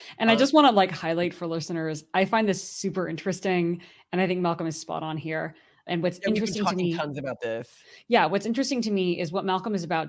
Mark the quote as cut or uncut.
uncut